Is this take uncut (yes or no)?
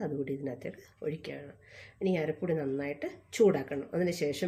yes